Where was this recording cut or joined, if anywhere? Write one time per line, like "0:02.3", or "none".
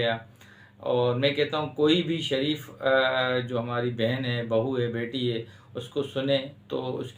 none

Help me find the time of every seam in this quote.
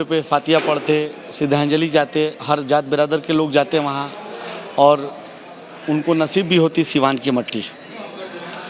none

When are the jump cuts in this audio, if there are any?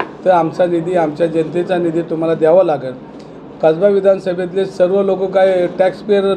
none

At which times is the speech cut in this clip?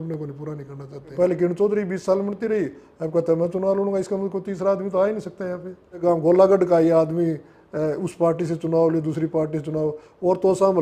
0:01.1
0:06.0

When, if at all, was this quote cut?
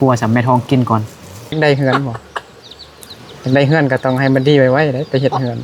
0:01.5

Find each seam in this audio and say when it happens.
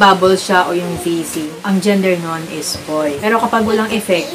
0:01.5
0:03.2

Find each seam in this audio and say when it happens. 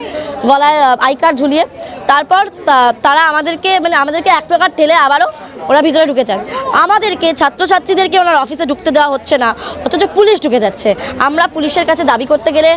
none

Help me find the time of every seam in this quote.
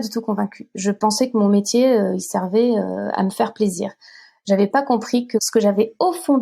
0:05.4

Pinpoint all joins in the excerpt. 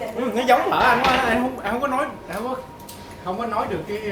none

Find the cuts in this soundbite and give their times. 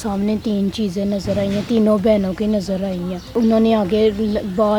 0:03.3

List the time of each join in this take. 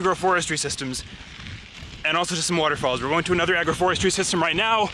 none

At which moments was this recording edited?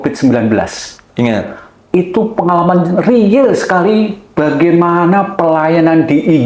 none

